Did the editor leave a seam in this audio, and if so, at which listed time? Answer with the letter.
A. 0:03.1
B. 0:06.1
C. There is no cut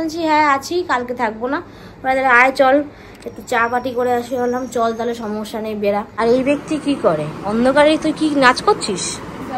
B